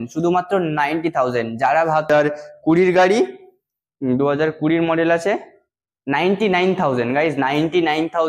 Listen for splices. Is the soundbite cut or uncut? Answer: cut